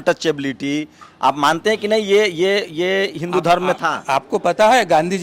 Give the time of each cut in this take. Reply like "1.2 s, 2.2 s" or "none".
none